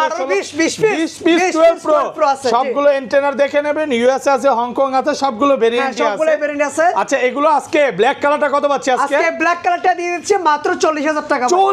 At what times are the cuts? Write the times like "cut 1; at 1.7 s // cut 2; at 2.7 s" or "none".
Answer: none